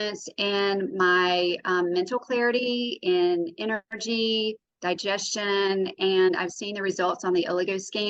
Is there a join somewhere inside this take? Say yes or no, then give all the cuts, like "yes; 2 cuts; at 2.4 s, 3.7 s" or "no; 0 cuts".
no; 0 cuts